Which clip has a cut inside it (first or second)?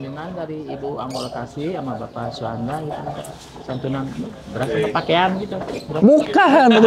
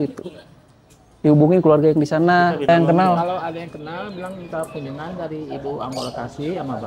second